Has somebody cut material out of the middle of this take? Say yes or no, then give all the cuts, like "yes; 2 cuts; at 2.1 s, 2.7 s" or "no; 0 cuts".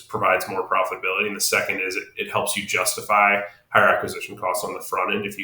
no; 0 cuts